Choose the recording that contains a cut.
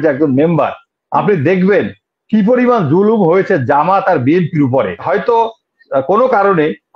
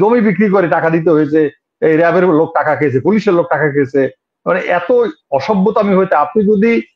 first; 1 cut; at 5.0 s

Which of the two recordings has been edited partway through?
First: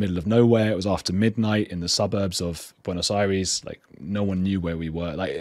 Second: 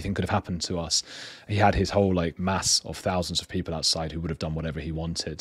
second; 1 cut; at 2.4 s

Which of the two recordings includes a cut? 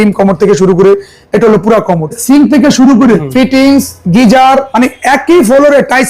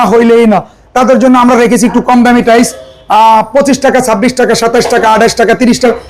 first; 3 cuts; at 2.2 s, 3.3 s, 4.7 s

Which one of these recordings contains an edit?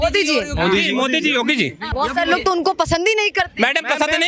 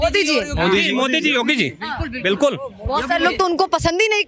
first; 1 cut; at 1.8 s

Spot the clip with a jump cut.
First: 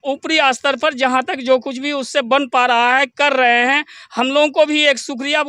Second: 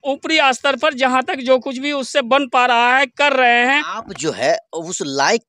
second; 1 cut; at 3.9 s

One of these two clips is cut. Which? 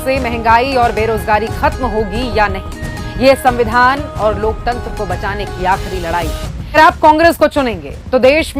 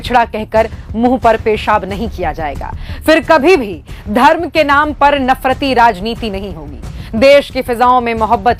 first; 1 cut; at 6.8 s

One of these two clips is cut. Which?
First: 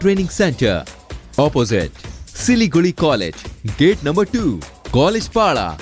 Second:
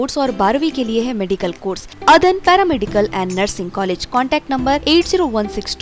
second; 1 cut; at 1.9 s

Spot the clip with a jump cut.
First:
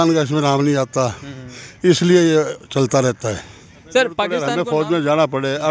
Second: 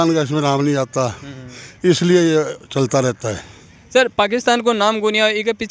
first; 1 cut; at 4.5 s

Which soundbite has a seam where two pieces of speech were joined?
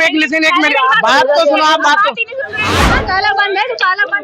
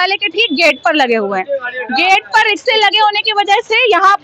first; 1 cut; at 2.6 s

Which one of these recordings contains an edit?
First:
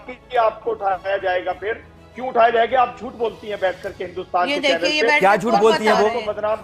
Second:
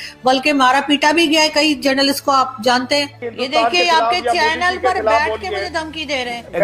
second; 1 cut; at 3.2 s

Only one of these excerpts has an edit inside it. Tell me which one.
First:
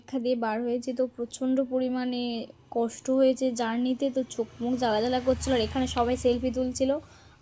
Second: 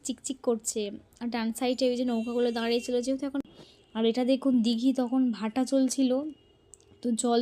second; 1 cut; at 3.5 s

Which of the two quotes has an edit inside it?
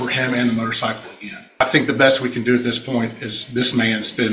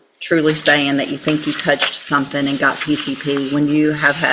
first; 1 cut; at 1.6 s

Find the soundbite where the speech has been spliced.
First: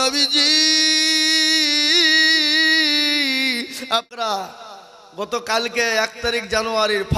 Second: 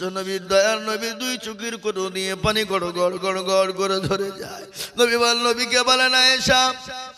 first; 1 cut; at 4.1 s

